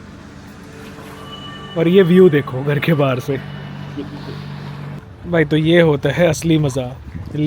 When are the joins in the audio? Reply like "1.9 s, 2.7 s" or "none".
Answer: 5.1 s